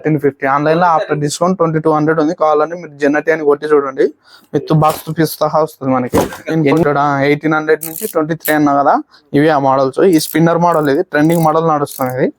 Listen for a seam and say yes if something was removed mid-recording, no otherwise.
yes